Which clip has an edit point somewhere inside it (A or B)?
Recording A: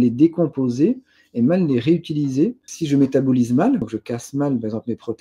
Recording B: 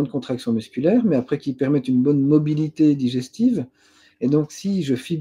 A